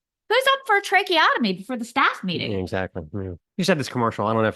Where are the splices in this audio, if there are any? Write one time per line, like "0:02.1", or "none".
0:03.4